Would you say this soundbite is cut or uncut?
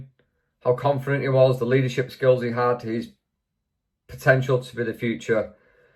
uncut